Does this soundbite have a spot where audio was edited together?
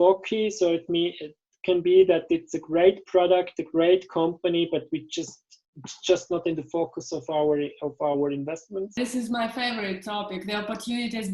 yes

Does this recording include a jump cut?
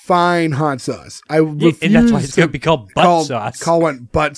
no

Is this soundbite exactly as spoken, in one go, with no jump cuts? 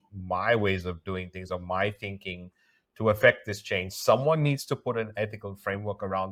yes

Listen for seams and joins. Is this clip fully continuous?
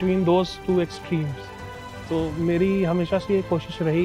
yes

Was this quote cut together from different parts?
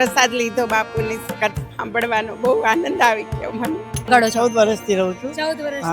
yes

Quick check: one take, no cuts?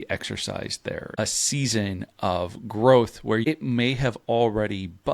no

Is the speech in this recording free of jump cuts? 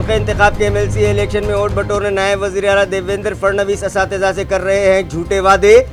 yes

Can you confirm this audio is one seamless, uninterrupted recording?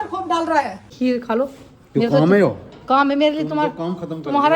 no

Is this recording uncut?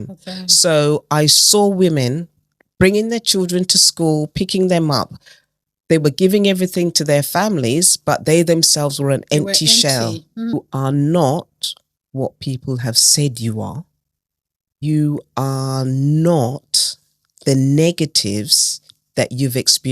no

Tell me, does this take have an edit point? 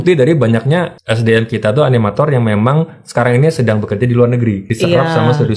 yes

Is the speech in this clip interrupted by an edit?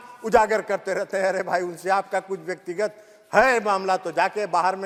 no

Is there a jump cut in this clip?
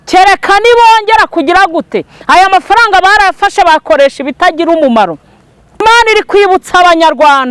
yes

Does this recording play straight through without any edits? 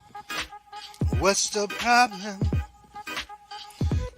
no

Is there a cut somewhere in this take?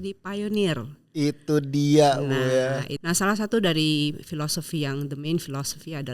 yes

